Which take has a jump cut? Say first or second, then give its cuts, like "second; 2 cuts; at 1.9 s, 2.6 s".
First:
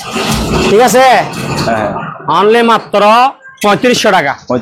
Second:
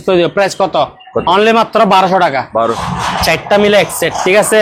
second; 1 cut; at 2.9 s